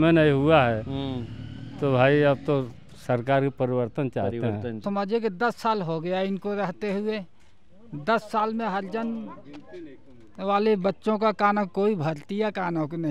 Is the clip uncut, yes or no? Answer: no